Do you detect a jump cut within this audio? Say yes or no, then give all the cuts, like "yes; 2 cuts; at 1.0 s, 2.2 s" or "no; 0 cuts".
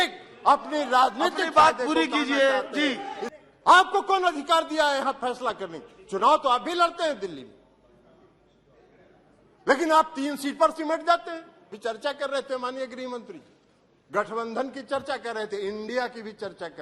yes; 2 cuts; at 3.2 s, 11.8 s